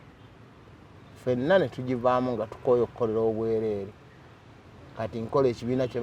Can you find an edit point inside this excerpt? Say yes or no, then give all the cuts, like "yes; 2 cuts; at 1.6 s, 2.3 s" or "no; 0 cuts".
no; 0 cuts